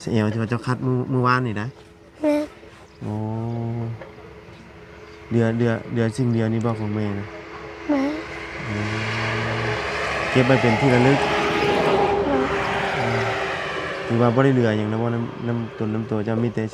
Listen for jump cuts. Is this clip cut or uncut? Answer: uncut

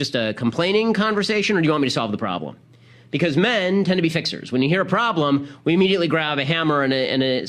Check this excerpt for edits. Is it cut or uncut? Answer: cut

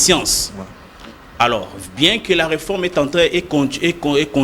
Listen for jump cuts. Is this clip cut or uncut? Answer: uncut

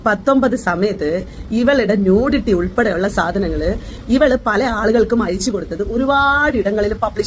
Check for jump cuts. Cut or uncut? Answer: uncut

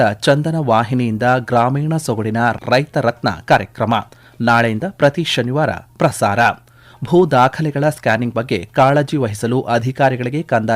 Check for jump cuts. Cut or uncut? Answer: cut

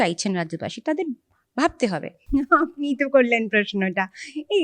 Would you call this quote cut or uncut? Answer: cut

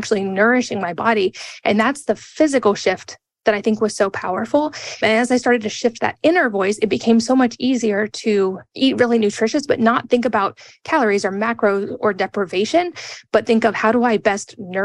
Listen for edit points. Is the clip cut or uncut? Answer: cut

